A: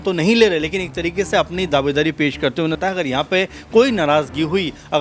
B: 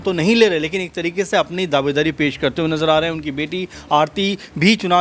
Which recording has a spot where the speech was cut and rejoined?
A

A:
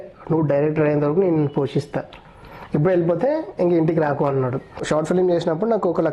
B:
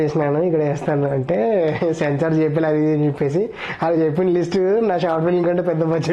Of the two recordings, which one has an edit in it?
A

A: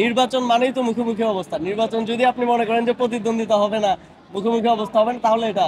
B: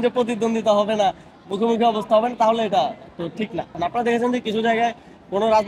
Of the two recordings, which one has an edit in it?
B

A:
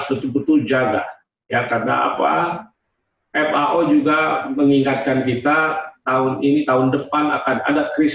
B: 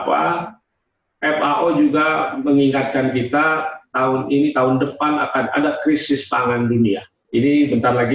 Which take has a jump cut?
B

